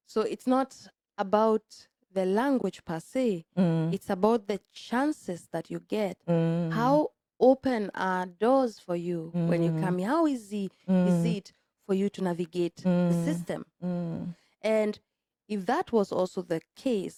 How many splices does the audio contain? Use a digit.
0